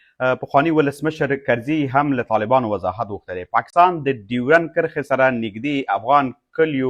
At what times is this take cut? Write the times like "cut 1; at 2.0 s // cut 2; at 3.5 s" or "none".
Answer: none